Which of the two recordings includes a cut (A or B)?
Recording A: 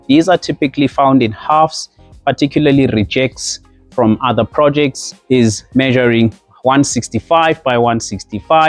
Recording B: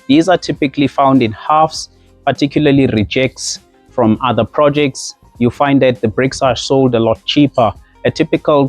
A